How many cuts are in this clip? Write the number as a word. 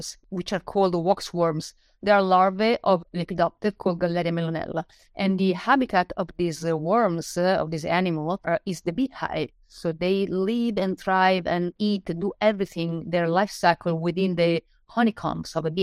zero